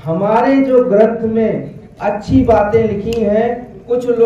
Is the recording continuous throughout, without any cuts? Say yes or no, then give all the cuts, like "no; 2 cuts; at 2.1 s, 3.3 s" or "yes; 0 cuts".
yes; 0 cuts